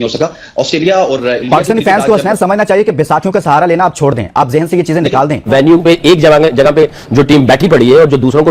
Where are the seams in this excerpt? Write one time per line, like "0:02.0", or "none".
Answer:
0:05.4